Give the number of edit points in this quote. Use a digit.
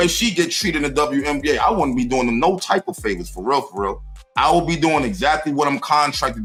0